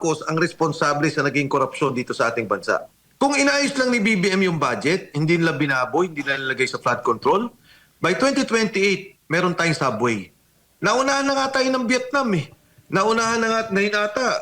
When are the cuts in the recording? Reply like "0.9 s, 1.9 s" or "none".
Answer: 3.0 s

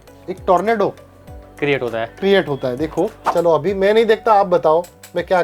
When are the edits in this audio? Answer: 3.2 s

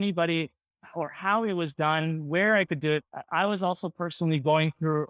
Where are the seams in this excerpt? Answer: 3.2 s

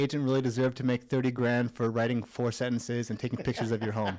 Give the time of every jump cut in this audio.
none

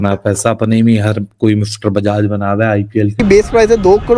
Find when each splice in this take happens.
3.1 s

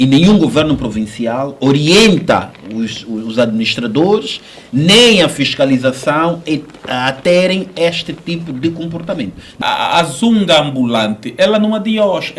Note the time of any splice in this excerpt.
9.6 s

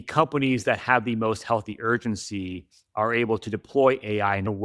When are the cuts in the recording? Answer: none

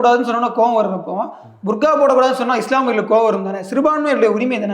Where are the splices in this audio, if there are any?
none

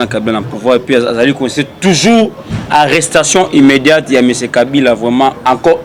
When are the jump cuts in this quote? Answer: none

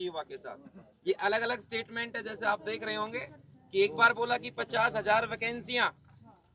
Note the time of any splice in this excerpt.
none

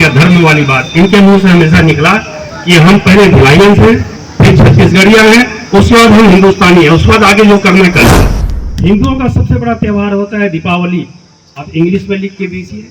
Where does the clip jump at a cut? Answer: 8.1 s

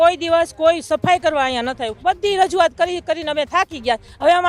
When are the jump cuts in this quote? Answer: 1.9 s

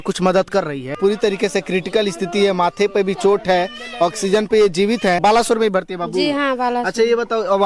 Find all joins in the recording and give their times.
0.9 s, 5.2 s

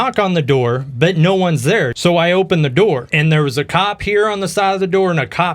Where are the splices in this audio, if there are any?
1.9 s, 3.1 s

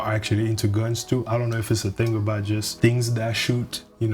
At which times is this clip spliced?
2.7 s

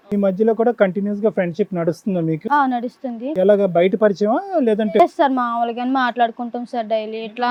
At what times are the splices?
none

